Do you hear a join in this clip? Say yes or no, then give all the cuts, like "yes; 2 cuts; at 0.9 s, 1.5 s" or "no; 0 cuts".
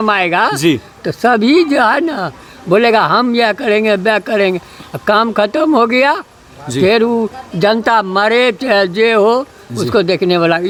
no; 0 cuts